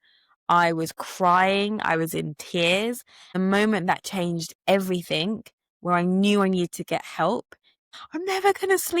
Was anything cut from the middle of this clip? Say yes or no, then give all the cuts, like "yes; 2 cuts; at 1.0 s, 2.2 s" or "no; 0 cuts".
yes; 2 cuts; at 3.3 s, 7.8 s